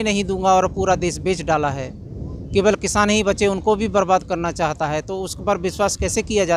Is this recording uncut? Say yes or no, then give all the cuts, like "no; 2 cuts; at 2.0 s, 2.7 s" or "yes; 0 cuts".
yes; 0 cuts